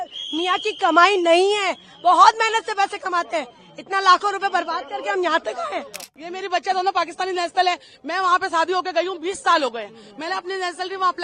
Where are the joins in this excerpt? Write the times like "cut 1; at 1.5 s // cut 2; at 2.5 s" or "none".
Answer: cut 1; at 6.1 s